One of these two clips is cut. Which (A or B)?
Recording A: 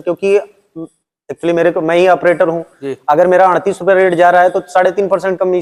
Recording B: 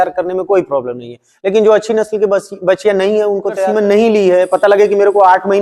B